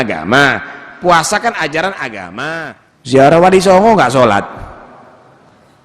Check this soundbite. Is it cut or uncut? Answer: cut